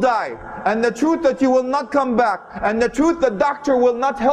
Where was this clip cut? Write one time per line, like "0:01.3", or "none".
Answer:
none